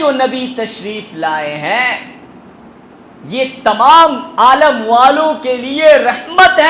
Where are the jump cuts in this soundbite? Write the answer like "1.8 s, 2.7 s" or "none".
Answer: none